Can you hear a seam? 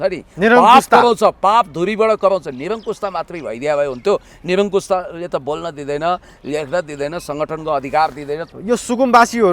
yes; 1 cut; at 8.5 s

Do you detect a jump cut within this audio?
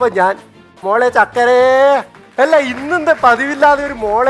yes; 1 cut; at 2.2 s

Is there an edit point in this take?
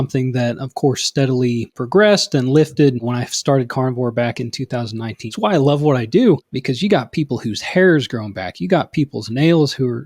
yes; 4 cuts; at 1.7 s, 3.0 s, 5.2 s, 6.5 s

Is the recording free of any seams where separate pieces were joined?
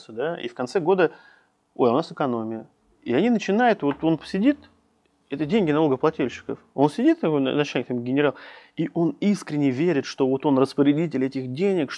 yes; 0 cuts

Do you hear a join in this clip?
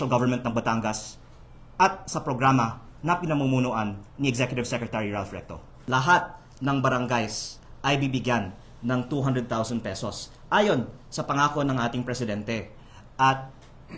yes; 1 cut; at 5.9 s

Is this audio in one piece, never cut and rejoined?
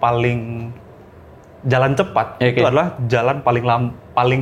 yes; 0 cuts

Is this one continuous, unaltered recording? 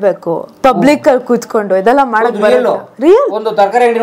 yes; 0 cuts

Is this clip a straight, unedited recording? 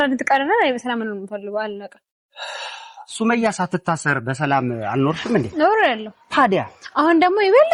yes; 0 cuts

